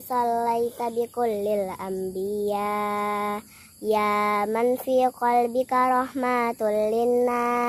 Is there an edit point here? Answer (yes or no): no